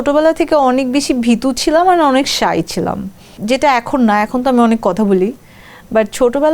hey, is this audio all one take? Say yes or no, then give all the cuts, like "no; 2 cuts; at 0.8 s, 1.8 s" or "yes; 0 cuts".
yes; 0 cuts